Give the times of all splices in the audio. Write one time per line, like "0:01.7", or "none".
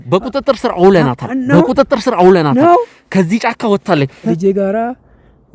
0:04.2